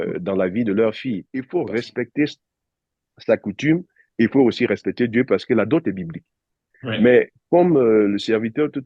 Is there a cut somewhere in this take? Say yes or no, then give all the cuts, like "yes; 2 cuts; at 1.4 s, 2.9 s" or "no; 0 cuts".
yes; 1 cut; at 1.3 s